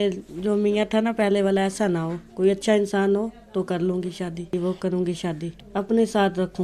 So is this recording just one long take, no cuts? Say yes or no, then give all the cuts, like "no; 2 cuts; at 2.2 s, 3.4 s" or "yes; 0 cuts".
no; 2 cuts; at 4.5 s, 5.5 s